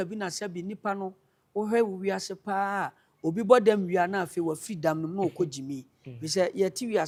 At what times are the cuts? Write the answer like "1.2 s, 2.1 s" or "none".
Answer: none